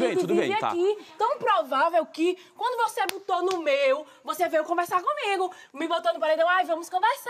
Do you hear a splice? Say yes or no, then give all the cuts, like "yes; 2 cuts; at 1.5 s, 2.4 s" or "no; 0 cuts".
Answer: no; 0 cuts